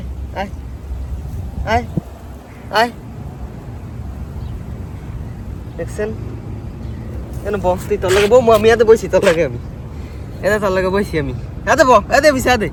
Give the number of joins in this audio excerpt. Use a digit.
0